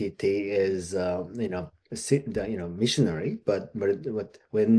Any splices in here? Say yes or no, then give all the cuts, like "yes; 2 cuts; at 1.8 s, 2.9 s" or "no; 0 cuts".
no; 0 cuts